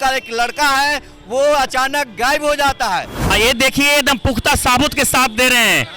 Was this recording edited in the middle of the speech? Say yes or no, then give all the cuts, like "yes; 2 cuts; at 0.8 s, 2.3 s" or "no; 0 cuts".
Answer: yes; 1 cut; at 3.3 s